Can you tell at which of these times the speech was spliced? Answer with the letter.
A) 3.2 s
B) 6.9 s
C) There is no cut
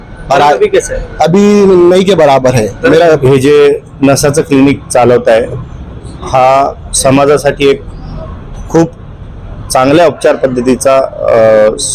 A